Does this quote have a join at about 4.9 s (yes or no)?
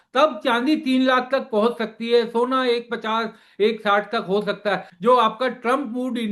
yes